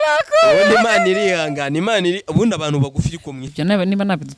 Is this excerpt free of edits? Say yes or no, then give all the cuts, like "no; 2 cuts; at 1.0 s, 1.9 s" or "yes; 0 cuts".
no; 1 cut; at 3.5 s